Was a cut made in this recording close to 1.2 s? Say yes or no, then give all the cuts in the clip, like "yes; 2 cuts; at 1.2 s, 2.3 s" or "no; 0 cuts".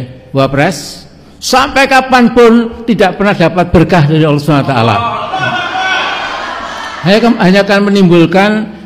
no; 0 cuts